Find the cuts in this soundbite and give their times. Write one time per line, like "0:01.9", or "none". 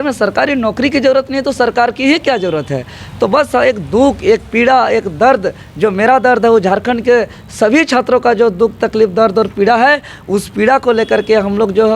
none

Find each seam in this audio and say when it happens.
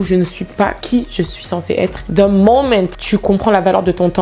0:02.0

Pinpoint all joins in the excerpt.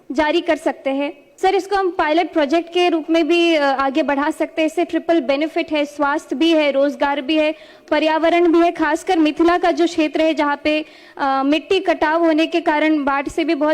0:01.2

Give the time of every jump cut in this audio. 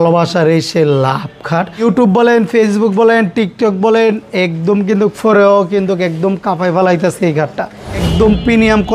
0:01.8
0:08.1

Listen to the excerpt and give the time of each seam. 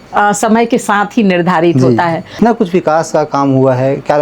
0:02.4

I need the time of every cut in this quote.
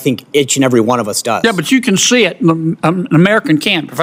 none

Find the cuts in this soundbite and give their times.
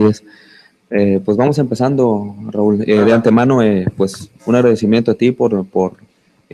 0:01.5

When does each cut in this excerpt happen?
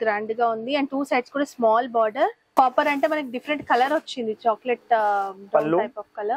0:02.4

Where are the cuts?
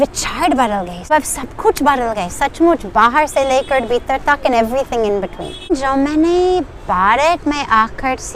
0:01.1
0:05.7

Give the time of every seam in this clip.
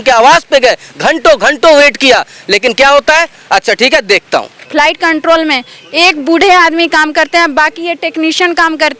0:04.6

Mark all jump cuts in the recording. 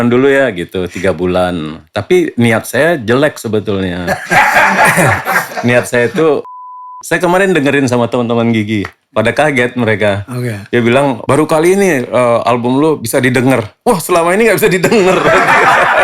0:06.8

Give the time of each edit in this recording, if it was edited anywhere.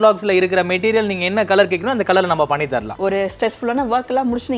0:02.9

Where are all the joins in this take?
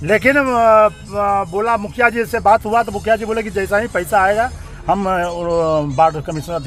none

